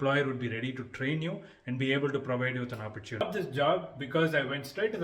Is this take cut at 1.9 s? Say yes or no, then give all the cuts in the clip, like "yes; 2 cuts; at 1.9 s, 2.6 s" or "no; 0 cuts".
no; 1 cut; at 3.2 s